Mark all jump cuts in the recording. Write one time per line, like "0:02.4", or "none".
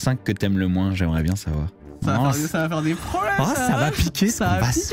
0:01.8